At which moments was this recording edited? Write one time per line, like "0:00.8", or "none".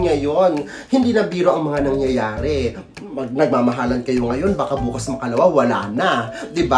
none